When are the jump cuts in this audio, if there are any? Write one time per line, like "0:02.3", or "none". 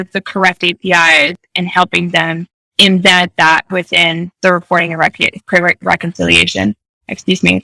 none